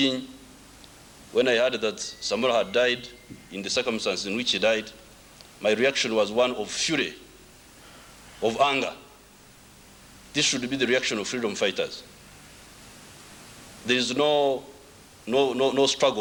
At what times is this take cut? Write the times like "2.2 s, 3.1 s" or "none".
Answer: none